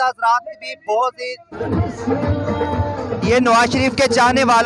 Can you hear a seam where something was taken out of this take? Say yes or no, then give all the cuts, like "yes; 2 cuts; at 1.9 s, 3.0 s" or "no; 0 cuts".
yes; 1 cut; at 1.6 s